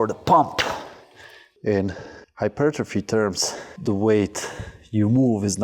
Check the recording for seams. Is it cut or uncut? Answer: cut